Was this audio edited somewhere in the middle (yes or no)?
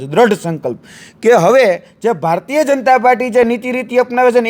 no